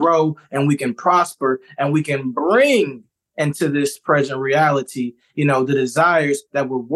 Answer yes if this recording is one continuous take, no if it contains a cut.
yes